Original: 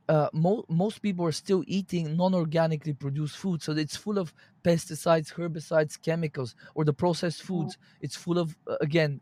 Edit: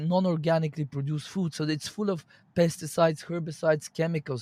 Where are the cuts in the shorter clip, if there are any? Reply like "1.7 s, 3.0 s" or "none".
none